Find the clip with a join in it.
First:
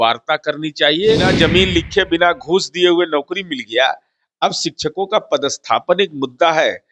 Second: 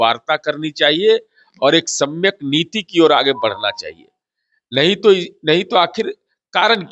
first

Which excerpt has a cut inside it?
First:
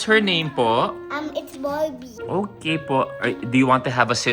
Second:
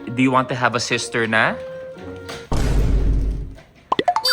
first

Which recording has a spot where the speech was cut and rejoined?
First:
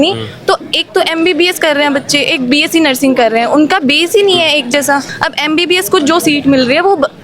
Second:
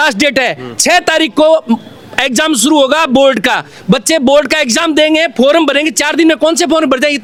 first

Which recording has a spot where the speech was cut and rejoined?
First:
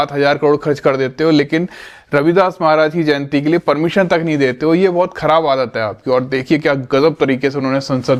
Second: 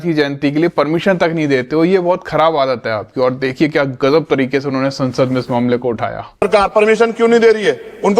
second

